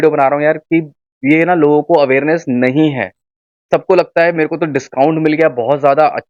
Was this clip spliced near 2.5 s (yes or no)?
no